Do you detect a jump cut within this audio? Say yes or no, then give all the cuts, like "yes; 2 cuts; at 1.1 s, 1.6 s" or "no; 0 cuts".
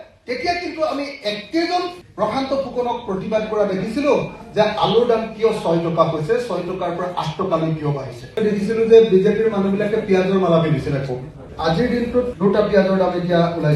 no; 0 cuts